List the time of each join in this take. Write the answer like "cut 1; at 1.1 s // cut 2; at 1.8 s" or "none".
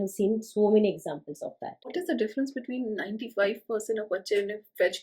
cut 1; at 1.9 s